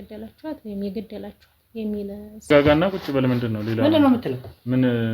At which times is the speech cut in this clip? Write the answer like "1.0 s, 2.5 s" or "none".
2.5 s